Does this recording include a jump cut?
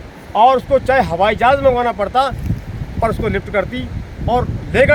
no; 0 cuts

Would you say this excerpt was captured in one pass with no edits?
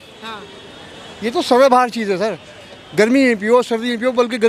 yes; 0 cuts

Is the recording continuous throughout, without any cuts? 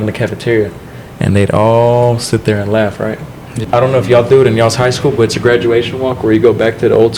no; 1 cut; at 3.6 s

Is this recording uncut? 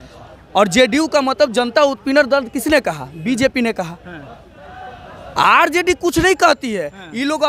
yes; 0 cuts

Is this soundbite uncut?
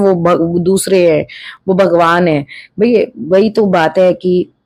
yes; 0 cuts

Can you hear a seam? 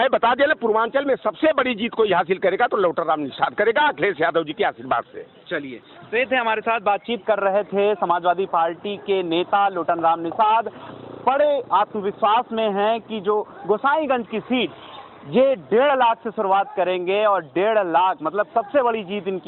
no; 0 cuts

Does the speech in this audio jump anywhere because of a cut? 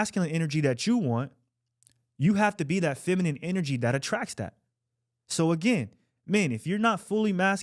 no; 0 cuts

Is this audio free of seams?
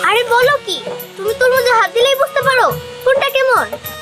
yes; 0 cuts

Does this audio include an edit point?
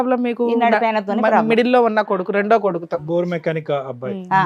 no; 0 cuts

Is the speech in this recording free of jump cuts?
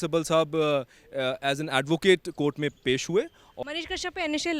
no; 1 cut; at 3.4 s

